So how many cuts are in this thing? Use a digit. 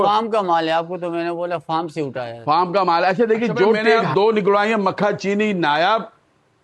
1